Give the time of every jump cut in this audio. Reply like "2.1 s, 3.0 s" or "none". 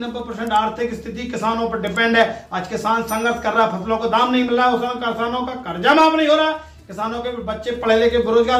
none